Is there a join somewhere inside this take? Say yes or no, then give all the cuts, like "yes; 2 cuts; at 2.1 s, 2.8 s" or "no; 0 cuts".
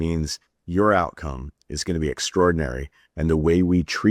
no; 0 cuts